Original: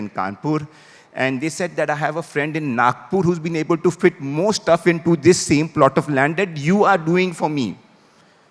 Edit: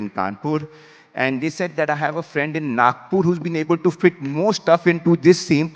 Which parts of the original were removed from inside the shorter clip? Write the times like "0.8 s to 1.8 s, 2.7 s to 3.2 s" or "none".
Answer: none